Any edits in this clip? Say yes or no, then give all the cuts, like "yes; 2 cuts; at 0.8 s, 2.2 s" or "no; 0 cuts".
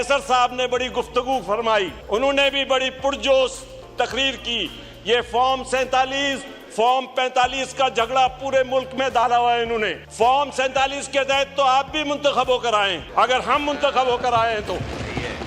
yes; 3 cuts; at 2.0 s, 10.0 s, 13.0 s